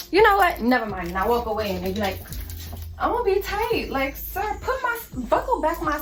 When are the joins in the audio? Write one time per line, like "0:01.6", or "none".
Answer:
none

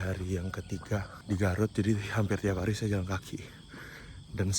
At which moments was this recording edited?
0:01.1

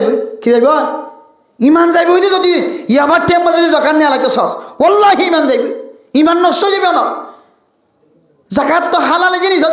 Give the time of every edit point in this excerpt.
none

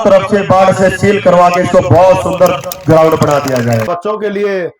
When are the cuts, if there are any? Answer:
0:03.9

